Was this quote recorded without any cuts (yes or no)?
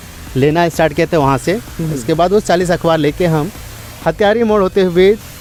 yes